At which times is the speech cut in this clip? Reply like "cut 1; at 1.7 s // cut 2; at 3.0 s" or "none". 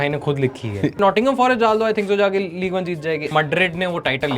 cut 1; at 1.0 s // cut 2; at 3.3 s